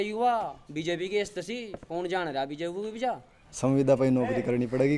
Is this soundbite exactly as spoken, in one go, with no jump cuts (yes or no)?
no